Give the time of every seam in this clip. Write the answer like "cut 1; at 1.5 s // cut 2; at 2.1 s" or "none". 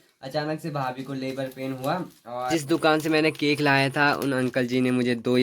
cut 1; at 2.5 s